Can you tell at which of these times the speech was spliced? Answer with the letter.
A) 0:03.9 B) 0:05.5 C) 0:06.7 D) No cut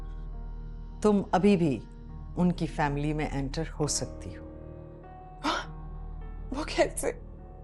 D